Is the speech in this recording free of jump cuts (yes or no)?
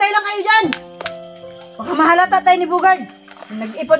yes